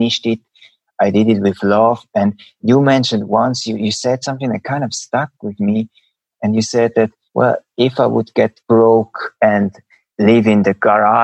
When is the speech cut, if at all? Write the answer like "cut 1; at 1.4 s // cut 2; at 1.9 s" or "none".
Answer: cut 1; at 5.0 s // cut 2; at 7.2 s // cut 3; at 8.6 s // cut 4; at 9.7 s